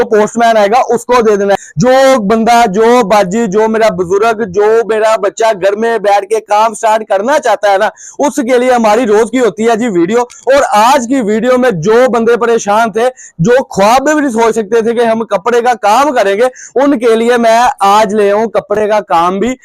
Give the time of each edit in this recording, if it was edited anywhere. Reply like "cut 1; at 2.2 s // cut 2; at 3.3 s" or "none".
cut 1; at 1.7 s